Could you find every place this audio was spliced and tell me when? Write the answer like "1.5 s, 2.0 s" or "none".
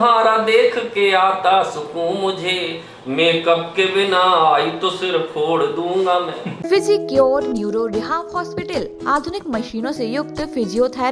6.5 s